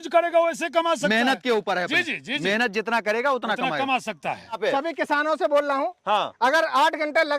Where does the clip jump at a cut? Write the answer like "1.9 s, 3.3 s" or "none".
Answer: 4.6 s